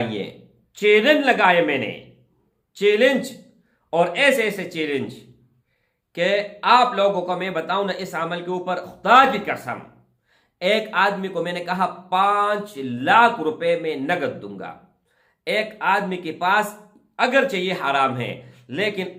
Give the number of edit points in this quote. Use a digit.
0